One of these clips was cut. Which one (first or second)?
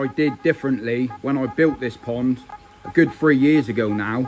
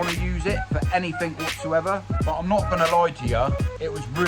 second